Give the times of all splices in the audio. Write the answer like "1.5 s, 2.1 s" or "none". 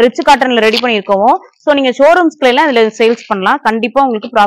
none